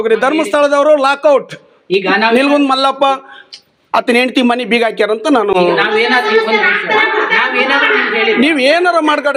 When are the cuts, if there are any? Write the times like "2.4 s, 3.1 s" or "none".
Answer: none